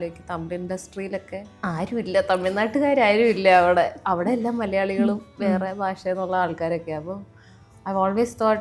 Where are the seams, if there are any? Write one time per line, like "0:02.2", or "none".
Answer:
0:01.5